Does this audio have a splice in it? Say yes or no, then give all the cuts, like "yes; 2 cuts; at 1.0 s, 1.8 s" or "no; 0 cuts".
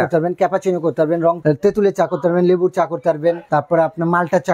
yes; 2 cuts; at 1.4 s, 3.4 s